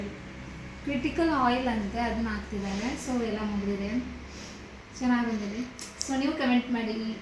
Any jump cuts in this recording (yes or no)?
no